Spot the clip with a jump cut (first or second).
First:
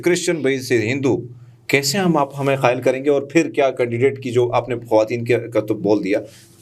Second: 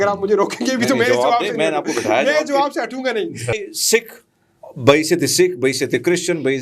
second